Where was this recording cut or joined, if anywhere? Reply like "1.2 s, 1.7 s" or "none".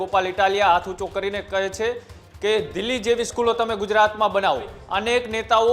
4.8 s